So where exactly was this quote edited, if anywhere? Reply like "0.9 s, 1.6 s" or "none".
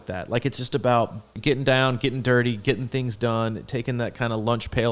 1.3 s